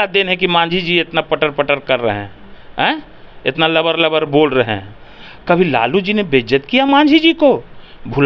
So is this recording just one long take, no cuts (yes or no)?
yes